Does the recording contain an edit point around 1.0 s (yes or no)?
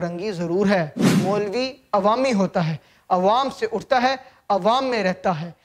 yes